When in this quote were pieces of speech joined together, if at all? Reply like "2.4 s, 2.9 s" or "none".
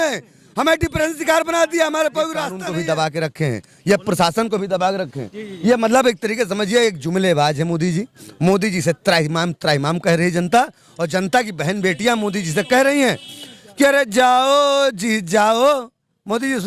2.6 s